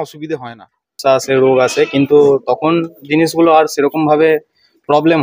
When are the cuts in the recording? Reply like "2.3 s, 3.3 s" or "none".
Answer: 1.0 s